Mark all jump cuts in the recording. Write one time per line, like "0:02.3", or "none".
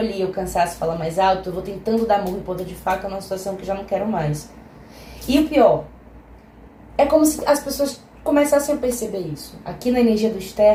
none